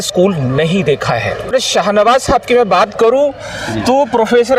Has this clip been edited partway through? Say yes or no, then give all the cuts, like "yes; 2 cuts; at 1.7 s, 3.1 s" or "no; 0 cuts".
yes; 1 cut; at 1.5 s